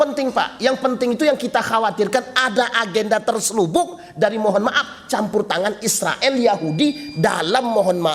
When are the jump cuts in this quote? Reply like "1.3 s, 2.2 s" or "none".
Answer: none